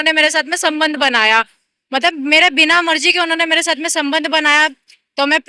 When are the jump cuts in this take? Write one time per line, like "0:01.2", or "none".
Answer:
none